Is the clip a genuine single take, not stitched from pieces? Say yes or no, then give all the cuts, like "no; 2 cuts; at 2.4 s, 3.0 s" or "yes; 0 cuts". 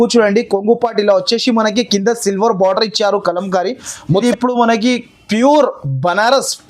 no; 1 cut; at 4.1 s